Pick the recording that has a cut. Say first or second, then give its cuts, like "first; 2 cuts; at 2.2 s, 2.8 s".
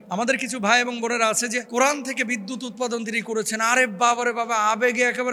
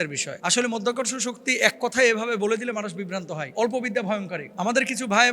second; 1 cut; at 3.5 s